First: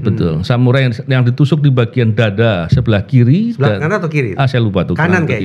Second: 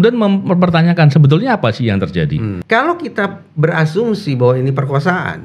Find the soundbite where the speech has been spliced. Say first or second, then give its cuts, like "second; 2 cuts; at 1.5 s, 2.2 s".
second; 1 cut; at 2.5 s